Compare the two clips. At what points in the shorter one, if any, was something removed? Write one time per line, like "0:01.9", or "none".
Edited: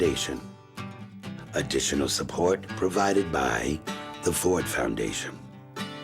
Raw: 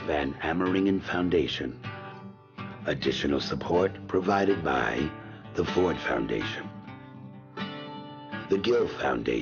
0:05.1